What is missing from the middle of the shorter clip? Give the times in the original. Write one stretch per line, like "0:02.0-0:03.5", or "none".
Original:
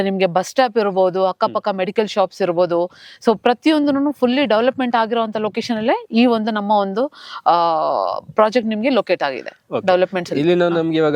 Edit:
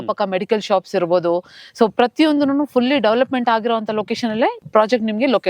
0:06.1-0:08.2